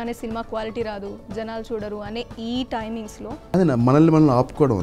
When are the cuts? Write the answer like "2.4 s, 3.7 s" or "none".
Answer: 3.5 s